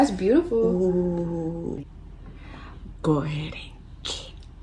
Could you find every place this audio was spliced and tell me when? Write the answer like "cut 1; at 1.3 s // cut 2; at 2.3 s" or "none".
cut 1; at 1.8 s